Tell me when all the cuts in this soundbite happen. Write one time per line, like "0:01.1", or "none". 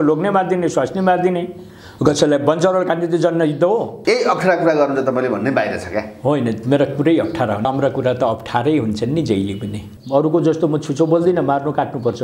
0:03.9
0:07.7
0:09.9